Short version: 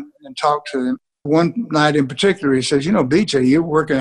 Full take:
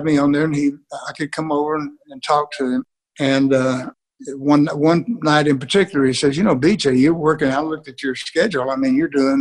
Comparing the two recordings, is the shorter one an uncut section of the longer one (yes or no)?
no